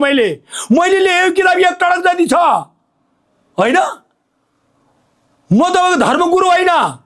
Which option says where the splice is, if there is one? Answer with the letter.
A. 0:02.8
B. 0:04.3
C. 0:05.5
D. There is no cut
D